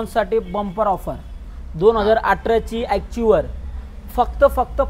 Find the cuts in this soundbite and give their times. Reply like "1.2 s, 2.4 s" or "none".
none